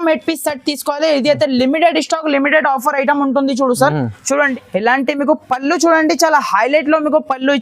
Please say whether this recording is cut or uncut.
cut